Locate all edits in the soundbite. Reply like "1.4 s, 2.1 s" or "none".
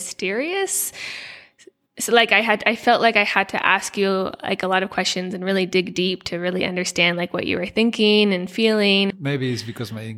9.1 s